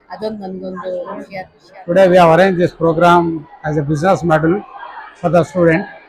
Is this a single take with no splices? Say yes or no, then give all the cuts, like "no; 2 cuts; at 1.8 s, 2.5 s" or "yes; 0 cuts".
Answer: no; 1 cut; at 1.6 s